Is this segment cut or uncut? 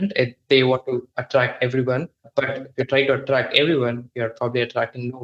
cut